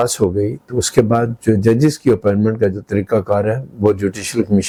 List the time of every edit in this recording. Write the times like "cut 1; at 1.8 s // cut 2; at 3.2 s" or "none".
none